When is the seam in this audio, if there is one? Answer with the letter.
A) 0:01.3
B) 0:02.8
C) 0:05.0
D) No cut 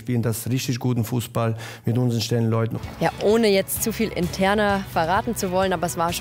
B